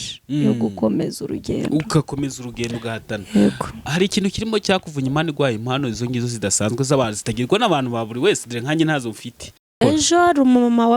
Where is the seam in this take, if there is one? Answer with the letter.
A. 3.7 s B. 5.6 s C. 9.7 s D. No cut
C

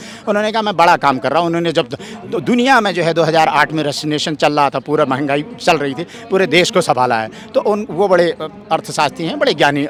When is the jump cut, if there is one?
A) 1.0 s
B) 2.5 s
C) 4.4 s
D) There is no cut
D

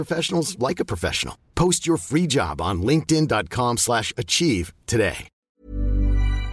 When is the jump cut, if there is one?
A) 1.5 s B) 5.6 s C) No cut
B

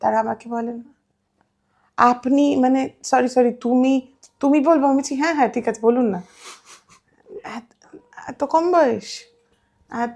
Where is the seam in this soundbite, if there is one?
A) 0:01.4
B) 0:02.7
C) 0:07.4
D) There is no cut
D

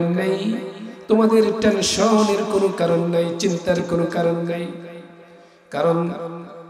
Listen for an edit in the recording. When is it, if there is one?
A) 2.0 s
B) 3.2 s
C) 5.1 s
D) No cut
D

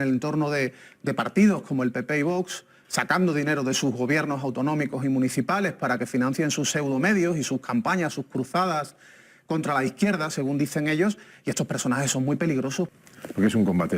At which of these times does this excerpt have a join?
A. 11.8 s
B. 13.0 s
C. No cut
B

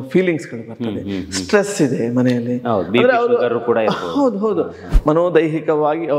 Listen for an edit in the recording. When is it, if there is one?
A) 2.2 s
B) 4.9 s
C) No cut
B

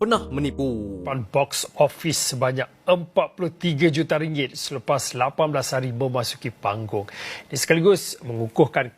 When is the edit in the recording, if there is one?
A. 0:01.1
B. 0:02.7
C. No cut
A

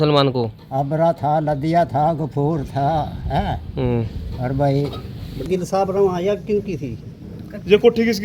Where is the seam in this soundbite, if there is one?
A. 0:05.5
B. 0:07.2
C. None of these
A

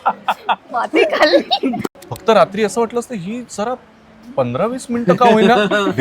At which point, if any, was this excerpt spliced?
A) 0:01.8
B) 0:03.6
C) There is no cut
A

